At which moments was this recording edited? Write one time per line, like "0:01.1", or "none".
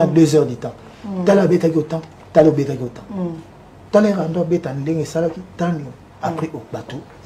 none